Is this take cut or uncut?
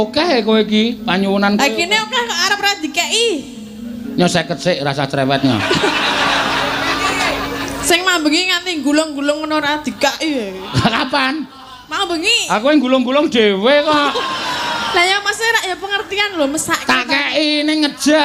uncut